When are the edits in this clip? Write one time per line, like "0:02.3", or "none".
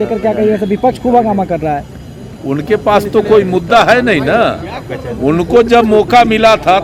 none

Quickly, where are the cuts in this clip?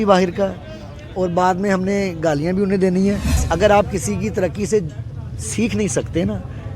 0:03.3

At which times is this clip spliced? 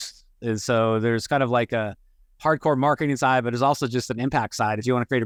none

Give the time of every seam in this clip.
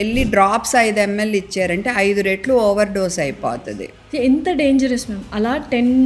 none

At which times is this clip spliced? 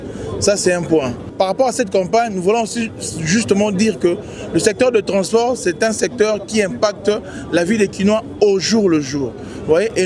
0:01.2

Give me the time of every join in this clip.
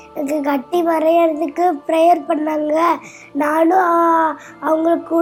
none

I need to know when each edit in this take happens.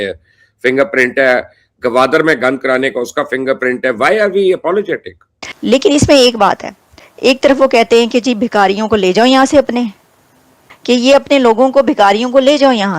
0:05.5
0:07.0

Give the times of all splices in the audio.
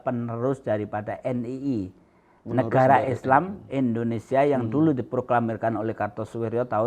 none

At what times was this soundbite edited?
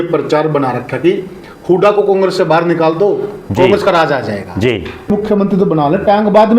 0:05.1

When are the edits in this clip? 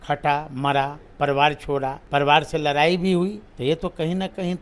0:02.0
0:03.5

